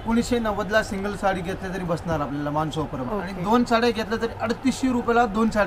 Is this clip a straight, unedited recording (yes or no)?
yes